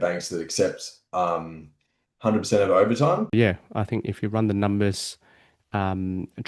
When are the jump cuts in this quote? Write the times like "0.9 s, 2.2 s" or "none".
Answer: 3.3 s